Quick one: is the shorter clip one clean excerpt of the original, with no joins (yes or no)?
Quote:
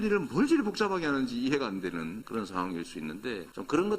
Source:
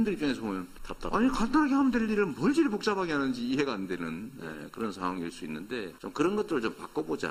no